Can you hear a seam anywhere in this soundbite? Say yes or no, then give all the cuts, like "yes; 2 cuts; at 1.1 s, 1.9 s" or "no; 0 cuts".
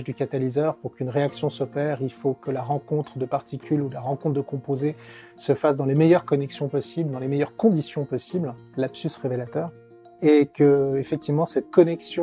yes; 1 cut; at 8.6 s